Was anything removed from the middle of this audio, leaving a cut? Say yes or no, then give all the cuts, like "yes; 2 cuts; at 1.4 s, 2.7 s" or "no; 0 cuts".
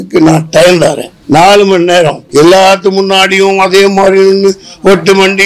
yes; 2 cuts; at 1.1 s, 2.2 s